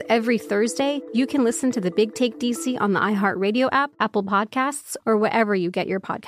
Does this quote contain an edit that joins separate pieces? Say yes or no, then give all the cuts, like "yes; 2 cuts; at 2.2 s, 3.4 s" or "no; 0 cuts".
yes; 2 cuts; at 1.0 s, 3.9 s